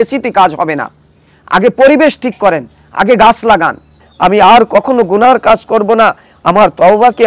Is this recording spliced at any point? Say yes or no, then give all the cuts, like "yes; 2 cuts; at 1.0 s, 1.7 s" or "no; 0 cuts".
yes; 1 cut; at 4.0 s